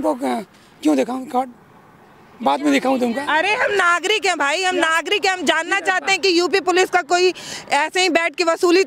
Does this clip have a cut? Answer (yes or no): no